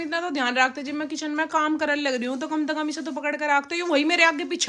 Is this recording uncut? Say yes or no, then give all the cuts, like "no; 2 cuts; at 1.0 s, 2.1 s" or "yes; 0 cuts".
yes; 0 cuts